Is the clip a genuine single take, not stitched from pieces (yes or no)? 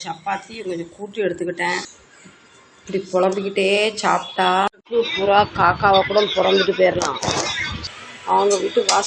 no